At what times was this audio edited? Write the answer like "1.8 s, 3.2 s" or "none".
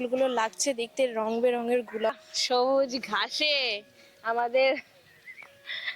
2.3 s